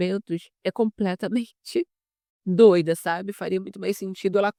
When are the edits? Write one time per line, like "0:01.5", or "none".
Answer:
none